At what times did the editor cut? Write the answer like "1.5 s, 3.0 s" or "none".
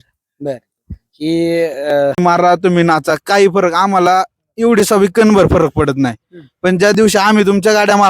2.2 s